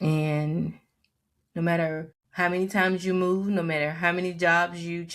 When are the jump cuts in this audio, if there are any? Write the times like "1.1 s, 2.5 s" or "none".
2.2 s